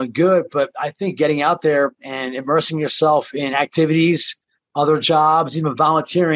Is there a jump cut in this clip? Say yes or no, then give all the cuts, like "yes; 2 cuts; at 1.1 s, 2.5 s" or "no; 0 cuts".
no; 0 cuts